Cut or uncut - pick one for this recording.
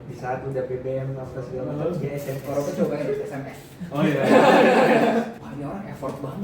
cut